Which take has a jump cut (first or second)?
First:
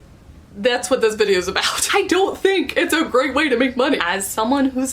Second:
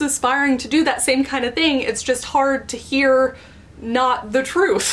first